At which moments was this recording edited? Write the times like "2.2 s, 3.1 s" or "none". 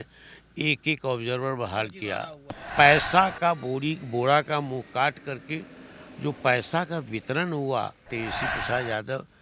2.6 s, 8.0 s